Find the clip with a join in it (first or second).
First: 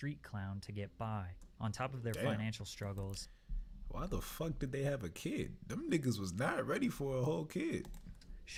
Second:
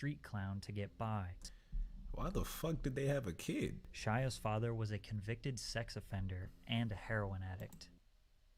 second